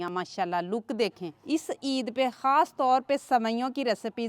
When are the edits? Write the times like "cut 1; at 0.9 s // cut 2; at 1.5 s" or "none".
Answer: cut 1; at 1.3 s